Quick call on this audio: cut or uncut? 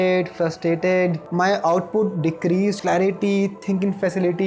cut